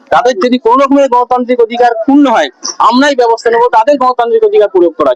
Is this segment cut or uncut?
uncut